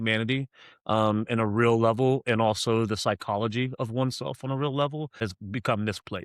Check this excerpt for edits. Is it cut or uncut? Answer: cut